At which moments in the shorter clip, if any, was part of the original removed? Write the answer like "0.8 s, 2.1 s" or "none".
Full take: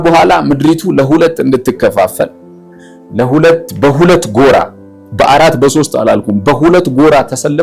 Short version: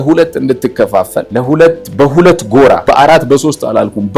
1.3 s, 2.8 s